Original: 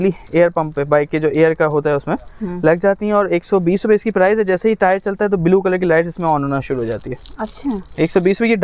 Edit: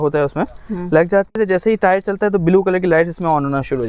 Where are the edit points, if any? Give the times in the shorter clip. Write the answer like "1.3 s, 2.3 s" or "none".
1.4 s